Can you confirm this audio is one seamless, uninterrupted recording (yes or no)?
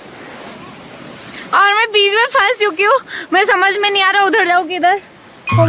yes